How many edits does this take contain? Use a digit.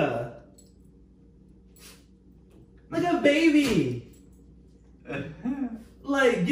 0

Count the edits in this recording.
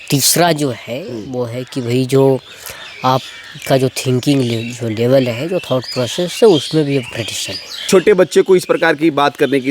1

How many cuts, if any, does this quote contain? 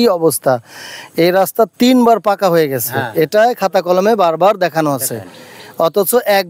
0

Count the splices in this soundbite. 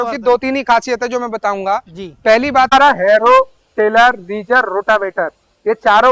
1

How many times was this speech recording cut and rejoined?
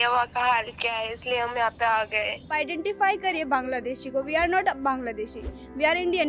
1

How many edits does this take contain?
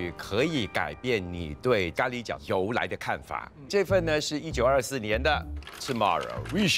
0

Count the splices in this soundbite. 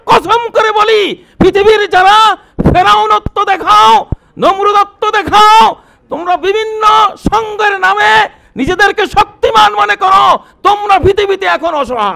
0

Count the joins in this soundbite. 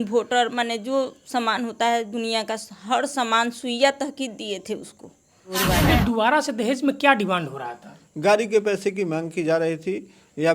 1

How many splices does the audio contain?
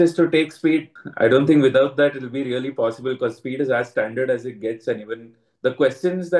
1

